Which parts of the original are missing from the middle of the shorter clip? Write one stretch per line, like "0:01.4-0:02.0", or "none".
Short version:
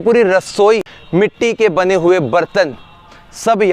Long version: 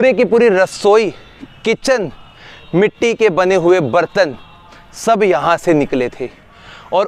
0:01.2-0:02.6